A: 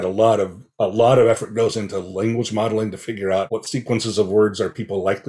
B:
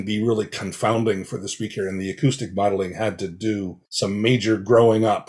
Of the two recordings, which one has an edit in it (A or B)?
B